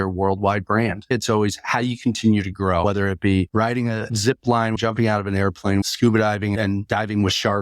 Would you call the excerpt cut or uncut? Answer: cut